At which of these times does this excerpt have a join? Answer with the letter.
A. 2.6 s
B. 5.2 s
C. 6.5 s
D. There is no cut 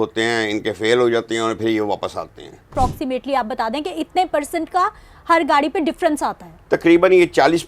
A